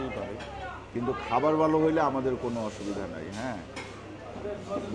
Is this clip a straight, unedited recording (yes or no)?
yes